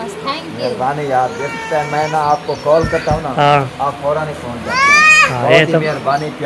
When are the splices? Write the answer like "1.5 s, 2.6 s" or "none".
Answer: none